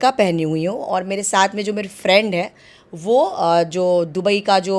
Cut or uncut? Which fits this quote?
uncut